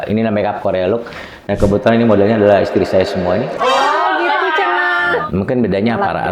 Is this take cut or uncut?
cut